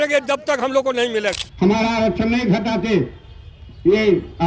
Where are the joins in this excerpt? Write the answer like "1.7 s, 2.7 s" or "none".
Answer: 1.4 s